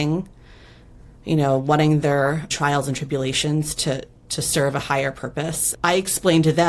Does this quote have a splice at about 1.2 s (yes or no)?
no